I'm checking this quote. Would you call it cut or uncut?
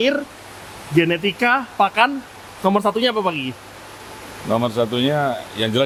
uncut